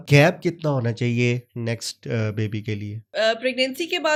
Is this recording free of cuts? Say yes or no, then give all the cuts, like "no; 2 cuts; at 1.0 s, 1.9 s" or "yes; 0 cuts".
yes; 0 cuts